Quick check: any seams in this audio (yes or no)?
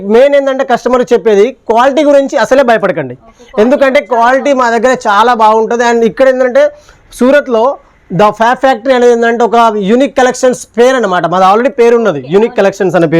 no